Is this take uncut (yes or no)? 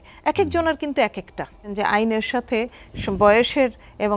no